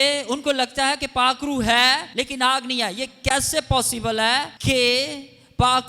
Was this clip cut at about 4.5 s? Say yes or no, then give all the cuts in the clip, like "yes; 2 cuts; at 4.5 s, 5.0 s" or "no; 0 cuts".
yes; 2 cuts; at 2.1 s, 4.5 s